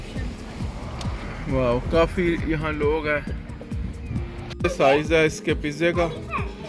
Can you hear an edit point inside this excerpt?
yes; 1 cut; at 4.6 s

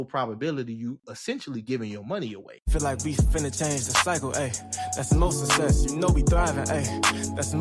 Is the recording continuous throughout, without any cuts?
no; 1 cut; at 2.5 s

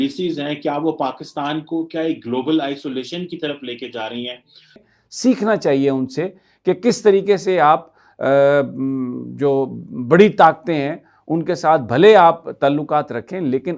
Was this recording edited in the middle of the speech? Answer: yes; 1 cut; at 4.7 s

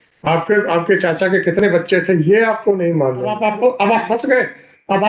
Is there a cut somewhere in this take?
yes; 1 cut; at 3.3 s

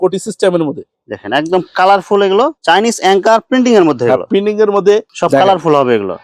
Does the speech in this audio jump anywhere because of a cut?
yes; 2 cuts; at 2.6 s, 5.1 s

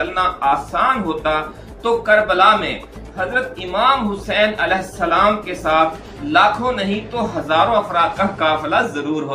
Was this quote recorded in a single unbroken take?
yes; 0 cuts

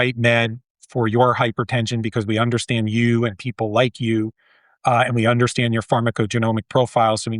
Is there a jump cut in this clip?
no; 0 cuts

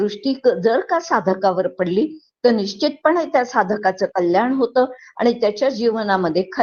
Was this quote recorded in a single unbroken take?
yes; 0 cuts

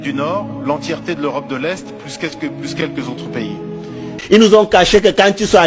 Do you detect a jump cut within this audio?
yes; 1 cut; at 4.1 s

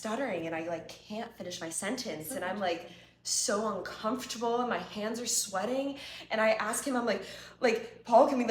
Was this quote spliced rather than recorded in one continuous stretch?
no; 0 cuts

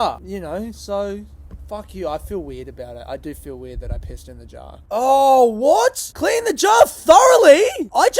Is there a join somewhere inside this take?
yes; 1 cut; at 4.8 s

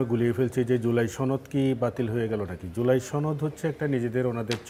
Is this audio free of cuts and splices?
yes; 0 cuts

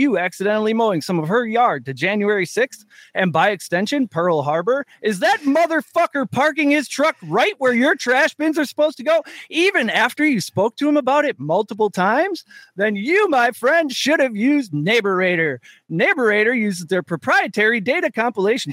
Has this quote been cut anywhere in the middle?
no; 0 cuts

